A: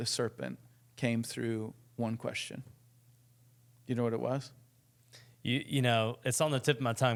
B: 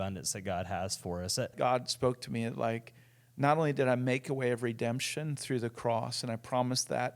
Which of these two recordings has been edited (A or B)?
B